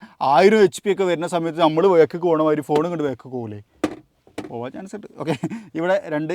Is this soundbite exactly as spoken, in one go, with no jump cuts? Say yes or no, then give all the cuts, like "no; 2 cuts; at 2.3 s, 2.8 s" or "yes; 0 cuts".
yes; 0 cuts